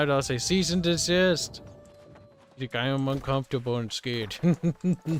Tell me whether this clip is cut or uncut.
uncut